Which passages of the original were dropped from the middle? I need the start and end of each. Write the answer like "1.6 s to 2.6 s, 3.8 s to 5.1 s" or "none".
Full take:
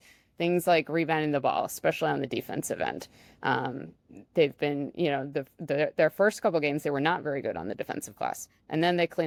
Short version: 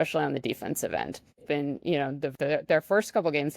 3.3 s to 4.5 s, 5.5 s to 5.6 s